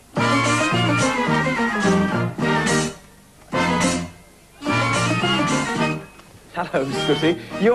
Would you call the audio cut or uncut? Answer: cut